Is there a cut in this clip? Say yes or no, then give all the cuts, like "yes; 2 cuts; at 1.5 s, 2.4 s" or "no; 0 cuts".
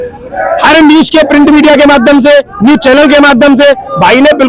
no; 0 cuts